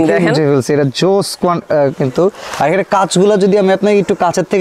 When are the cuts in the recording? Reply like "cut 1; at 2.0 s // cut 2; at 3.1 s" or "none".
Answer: none